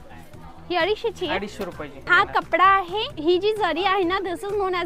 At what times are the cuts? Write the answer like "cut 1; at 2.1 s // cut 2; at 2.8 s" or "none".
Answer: cut 1; at 3.1 s